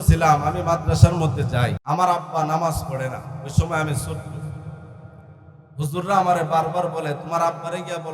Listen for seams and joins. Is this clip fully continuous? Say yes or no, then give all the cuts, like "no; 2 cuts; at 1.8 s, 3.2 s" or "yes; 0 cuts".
no; 1 cut; at 1.8 s